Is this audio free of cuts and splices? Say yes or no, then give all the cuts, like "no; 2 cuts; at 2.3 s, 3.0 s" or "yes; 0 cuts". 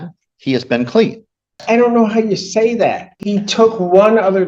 no; 2 cuts; at 1.6 s, 3.1 s